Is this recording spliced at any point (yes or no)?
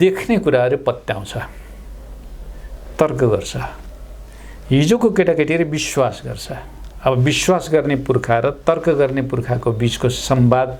no